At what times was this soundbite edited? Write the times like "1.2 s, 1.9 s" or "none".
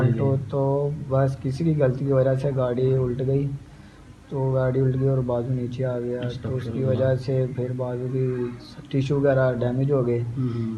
none